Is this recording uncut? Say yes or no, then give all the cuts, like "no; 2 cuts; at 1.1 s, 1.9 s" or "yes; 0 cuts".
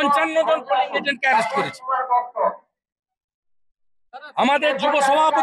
yes; 0 cuts